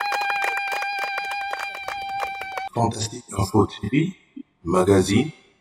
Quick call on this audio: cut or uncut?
uncut